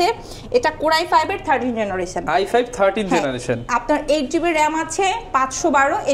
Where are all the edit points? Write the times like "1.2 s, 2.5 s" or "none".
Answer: none